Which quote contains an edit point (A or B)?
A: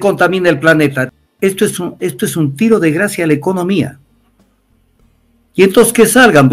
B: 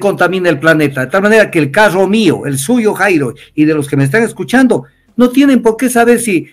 A